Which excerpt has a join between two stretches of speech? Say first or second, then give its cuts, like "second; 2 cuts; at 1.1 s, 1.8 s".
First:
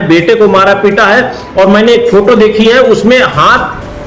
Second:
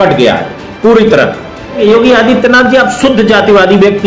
second; 1 cut; at 1.8 s